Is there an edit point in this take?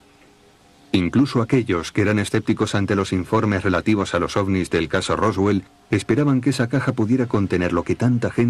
yes; 1 cut; at 1.6 s

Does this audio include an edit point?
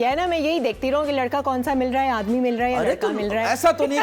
no; 0 cuts

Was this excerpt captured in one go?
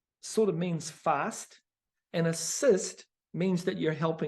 yes; 0 cuts

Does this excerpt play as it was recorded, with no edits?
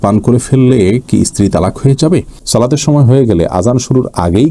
no; 1 cut; at 2.4 s

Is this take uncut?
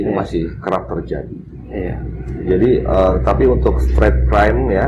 yes; 0 cuts

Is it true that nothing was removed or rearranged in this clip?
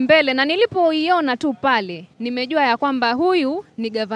yes; 0 cuts

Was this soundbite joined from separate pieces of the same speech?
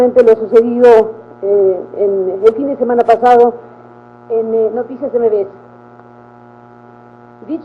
no; 0 cuts

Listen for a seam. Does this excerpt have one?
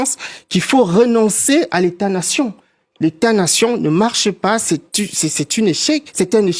no; 0 cuts

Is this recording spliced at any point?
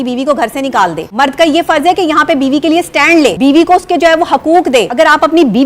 yes; 3 cuts; at 1.0 s, 3.3 s, 4.9 s

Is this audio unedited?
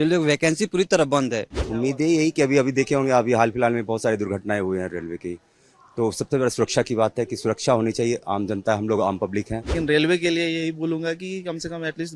no; 2 cuts; at 1.6 s, 9.7 s

